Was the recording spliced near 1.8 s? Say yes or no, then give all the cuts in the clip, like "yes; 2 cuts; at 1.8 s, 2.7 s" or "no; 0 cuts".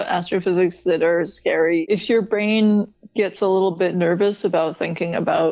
yes; 2 cuts; at 1.8 s, 3.0 s